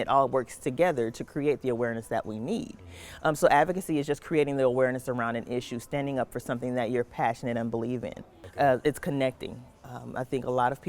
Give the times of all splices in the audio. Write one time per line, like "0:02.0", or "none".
0:08.5